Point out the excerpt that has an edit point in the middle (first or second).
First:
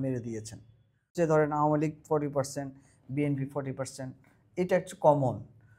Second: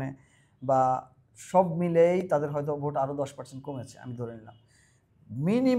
first